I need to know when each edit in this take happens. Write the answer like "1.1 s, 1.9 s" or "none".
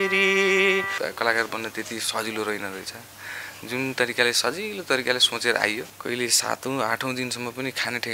1.0 s, 5.9 s